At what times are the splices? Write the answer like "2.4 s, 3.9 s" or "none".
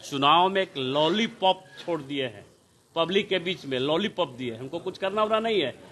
none